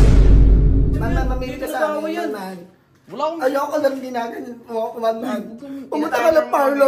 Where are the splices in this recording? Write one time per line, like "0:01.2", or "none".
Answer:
0:01.0

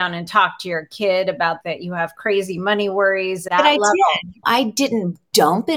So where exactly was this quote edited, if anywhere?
0:01.6
0:03.5
0:04.3

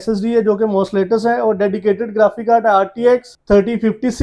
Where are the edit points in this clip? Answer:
0:03.3

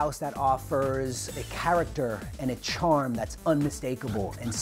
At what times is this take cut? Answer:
0:01.3

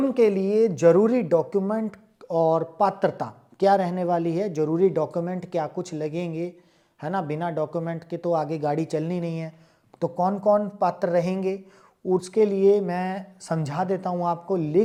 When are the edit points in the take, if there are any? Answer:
none

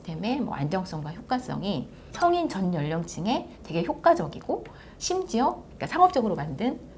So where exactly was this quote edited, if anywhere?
0:02.0

